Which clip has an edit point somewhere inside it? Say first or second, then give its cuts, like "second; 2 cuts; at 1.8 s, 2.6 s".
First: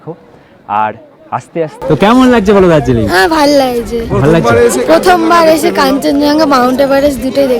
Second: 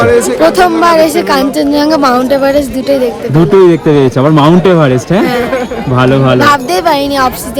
first; 1 cut; at 1.8 s